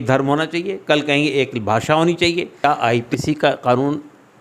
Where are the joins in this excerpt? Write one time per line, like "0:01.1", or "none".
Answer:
0:02.6